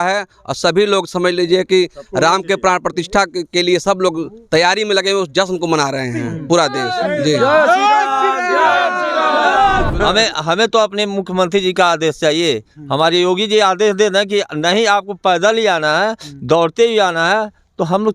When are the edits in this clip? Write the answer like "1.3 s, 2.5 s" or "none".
9.9 s